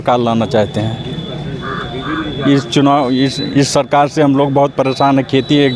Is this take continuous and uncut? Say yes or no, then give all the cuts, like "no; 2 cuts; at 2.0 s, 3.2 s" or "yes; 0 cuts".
yes; 0 cuts